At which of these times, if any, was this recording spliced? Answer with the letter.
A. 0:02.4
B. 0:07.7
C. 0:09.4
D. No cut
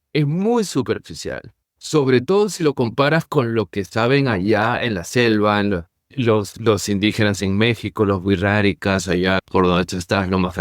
C